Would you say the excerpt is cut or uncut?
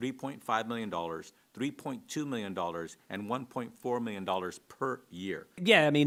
uncut